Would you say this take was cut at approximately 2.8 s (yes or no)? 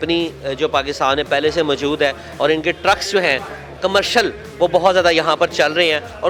no